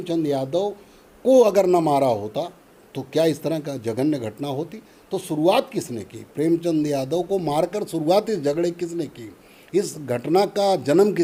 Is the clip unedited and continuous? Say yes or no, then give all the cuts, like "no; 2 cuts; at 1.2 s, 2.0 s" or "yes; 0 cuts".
yes; 0 cuts